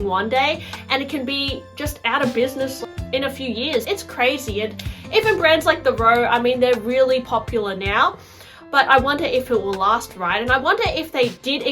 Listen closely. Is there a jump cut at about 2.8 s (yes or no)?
yes